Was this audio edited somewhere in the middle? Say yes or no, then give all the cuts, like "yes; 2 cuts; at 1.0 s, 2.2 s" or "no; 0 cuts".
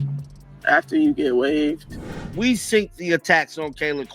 yes; 1 cut; at 2.1 s